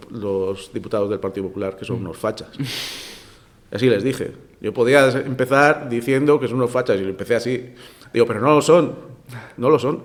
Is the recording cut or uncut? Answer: uncut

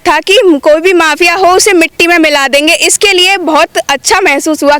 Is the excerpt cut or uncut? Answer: uncut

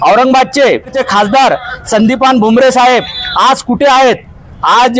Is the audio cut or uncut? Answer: cut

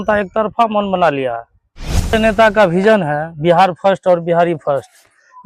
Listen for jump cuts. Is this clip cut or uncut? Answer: cut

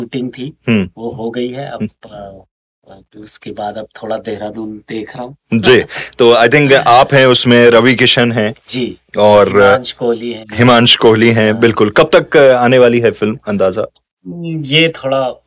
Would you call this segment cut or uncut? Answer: uncut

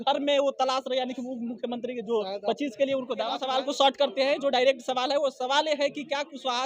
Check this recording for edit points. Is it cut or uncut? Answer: cut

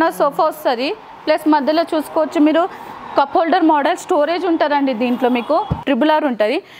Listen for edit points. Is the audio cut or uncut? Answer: cut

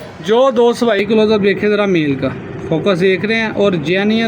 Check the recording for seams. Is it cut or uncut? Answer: cut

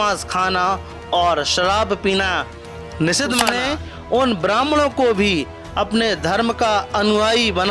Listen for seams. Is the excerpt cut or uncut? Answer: cut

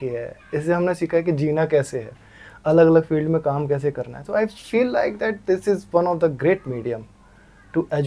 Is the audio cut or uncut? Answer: uncut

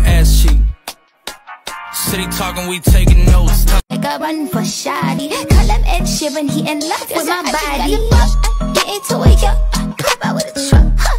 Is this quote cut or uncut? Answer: cut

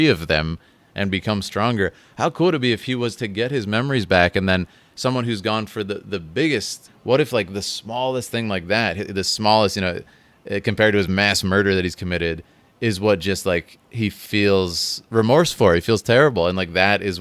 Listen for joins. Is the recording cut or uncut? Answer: cut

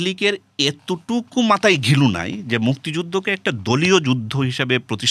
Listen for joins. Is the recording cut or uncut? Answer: uncut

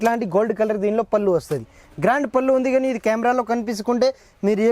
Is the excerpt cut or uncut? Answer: uncut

